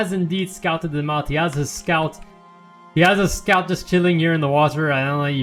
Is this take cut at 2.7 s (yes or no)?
no